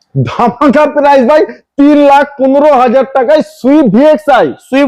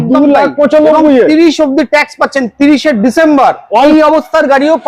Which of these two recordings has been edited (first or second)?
second